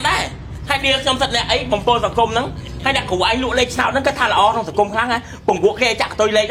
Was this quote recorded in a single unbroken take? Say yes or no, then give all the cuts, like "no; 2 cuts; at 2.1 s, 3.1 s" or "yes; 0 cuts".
yes; 0 cuts